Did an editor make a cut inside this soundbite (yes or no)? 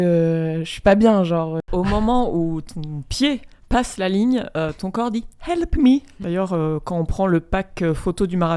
yes